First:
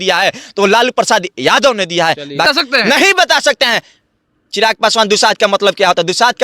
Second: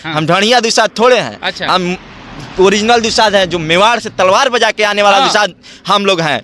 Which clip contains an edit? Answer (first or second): first